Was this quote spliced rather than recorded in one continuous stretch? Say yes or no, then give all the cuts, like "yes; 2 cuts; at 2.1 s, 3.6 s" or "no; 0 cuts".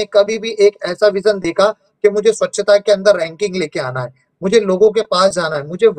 no; 0 cuts